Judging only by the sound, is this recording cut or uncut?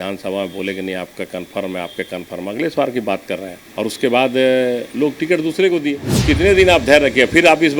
cut